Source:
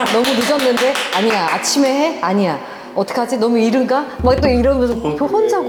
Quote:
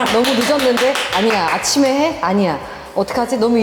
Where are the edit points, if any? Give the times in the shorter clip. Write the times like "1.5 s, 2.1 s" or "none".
none